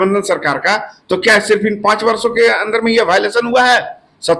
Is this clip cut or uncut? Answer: uncut